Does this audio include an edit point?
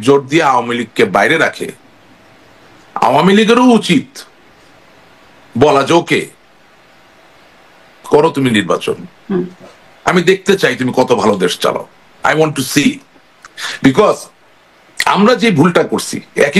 no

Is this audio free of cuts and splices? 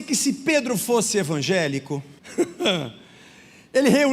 no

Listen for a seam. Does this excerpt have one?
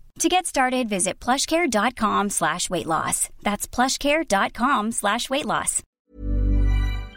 yes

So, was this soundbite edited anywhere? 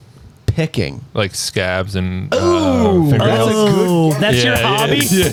no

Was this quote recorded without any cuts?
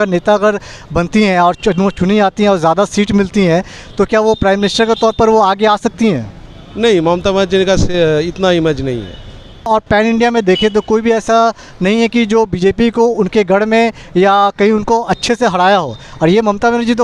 no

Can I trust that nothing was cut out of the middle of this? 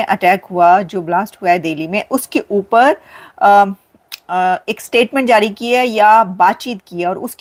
yes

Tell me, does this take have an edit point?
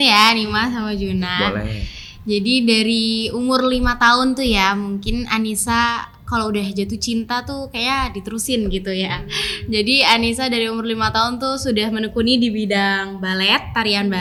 no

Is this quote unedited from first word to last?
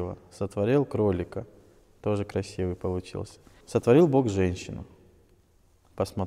no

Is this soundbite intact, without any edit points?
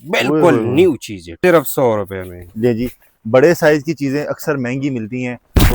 no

